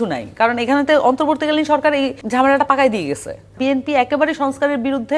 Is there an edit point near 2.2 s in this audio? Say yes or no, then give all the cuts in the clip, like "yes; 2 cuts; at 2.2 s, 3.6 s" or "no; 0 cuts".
yes; 2 cuts; at 2.2 s, 3.5 s